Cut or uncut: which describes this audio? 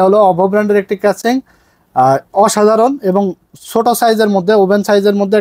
uncut